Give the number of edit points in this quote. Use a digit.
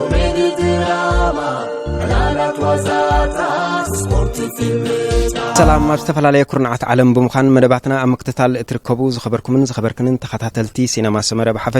1